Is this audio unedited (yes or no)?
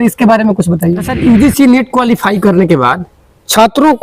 no